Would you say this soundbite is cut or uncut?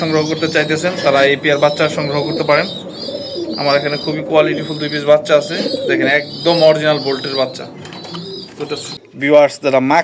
cut